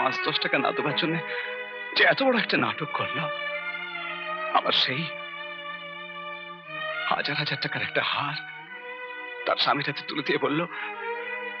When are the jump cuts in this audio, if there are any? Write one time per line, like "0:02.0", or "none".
none

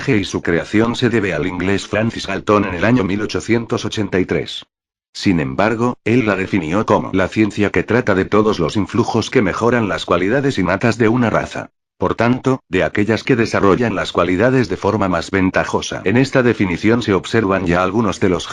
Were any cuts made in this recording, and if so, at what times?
0:07.3

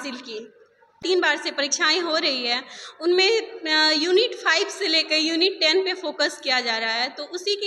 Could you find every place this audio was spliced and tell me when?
0:01.0

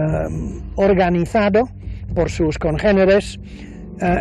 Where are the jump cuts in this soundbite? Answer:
0:01.2

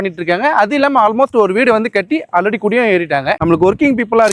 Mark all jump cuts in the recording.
0:03.4

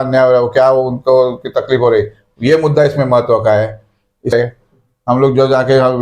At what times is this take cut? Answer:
0:04.3

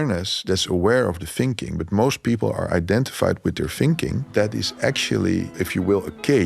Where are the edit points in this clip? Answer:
0:04.2
0:05.5

